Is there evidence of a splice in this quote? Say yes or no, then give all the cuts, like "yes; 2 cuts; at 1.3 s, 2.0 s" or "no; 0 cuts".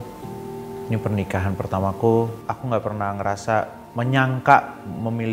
yes; 2 cuts; at 2.4 s, 3.8 s